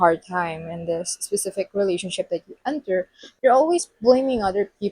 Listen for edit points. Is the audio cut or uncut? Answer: cut